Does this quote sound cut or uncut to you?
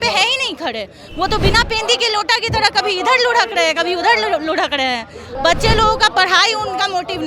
cut